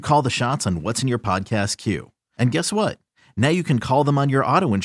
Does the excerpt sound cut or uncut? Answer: uncut